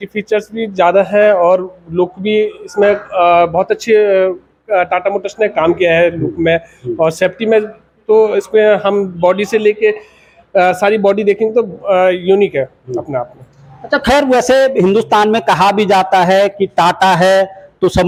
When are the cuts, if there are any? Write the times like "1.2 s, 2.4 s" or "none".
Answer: none